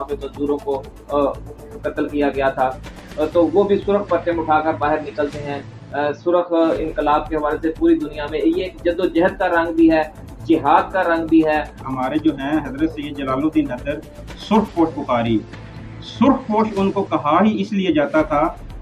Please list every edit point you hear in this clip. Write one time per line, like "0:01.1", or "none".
0:11.8